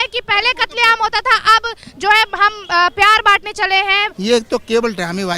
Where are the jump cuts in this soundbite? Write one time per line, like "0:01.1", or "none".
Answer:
0:04.1